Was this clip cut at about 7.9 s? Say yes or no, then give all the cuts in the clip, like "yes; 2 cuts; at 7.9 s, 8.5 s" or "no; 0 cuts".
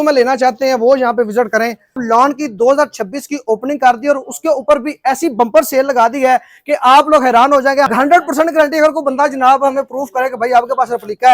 yes; 2 cuts; at 2.0 s, 7.9 s